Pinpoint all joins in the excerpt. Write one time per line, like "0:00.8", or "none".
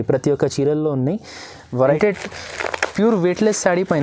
0:02.0